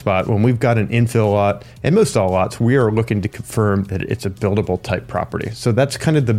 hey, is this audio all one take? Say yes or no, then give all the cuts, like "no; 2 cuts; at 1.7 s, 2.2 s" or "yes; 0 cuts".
yes; 0 cuts